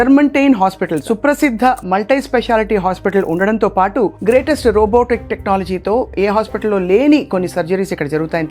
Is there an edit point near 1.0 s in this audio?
yes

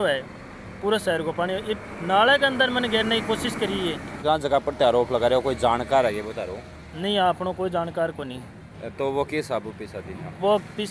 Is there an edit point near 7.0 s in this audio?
no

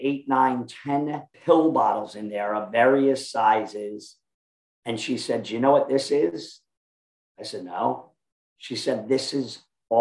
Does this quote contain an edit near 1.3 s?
yes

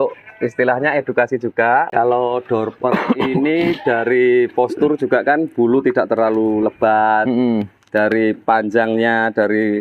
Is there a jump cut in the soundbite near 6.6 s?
no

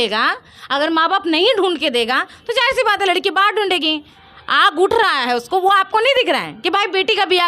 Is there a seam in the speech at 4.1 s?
yes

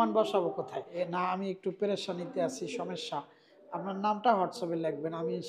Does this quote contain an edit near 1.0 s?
yes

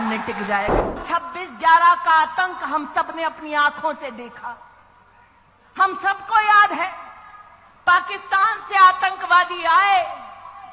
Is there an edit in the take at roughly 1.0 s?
yes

